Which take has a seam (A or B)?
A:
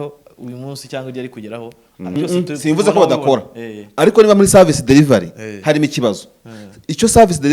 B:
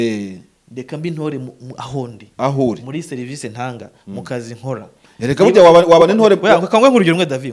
A